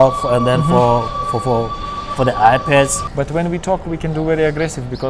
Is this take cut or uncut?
cut